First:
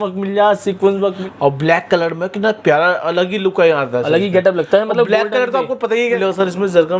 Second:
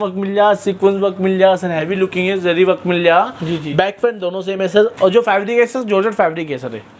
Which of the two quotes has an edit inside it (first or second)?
first